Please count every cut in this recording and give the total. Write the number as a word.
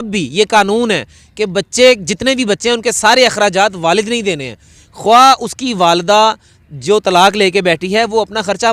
zero